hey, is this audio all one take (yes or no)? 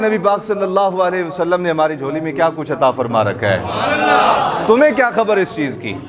yes